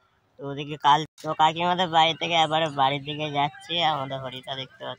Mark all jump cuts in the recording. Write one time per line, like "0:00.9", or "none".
0:01.1

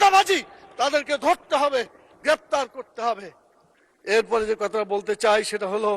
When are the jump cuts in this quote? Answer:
none

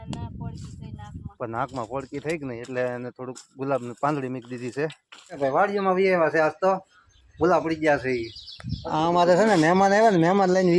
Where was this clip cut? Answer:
0:05.4

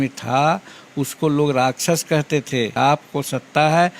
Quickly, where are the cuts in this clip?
0:02.7

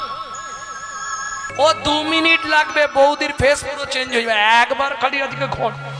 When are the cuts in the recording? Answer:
0:01.4

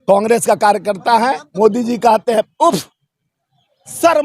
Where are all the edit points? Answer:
0:01.4

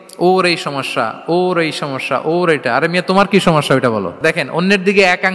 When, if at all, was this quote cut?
0:04.2

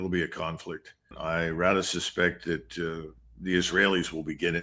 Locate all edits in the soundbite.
0:01.1

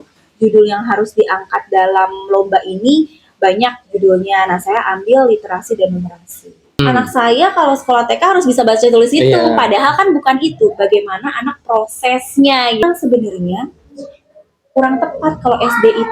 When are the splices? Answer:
0:06.8
0:12.8

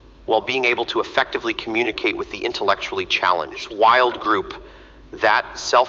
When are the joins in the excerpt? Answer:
0:03.7

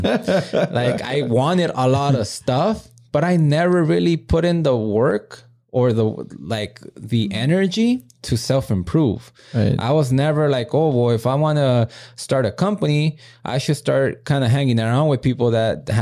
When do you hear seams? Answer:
none

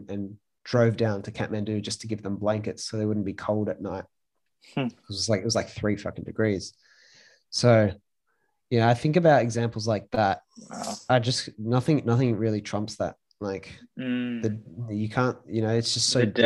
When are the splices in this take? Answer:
0:11.1

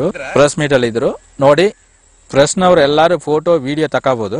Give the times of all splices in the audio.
none

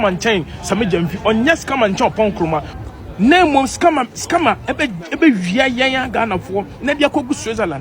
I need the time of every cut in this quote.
0:02.7

